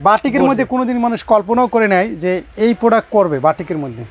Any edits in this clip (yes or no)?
no